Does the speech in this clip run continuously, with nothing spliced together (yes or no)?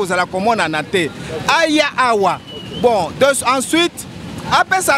yes